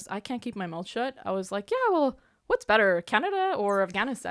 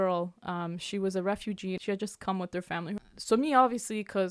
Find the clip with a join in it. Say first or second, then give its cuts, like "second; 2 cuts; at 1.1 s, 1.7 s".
second; 2 cuts; at 1.8 s, 3.0 s